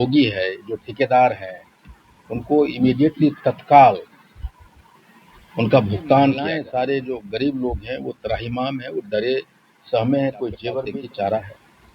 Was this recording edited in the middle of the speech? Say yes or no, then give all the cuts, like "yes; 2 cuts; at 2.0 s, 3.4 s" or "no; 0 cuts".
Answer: yes; 2 cuts; at 6.5 s, 10.8 s